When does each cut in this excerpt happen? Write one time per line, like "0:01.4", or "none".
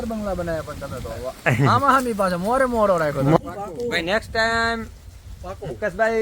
0:03.4